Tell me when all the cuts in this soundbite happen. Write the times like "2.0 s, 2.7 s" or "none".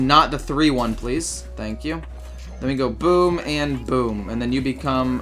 none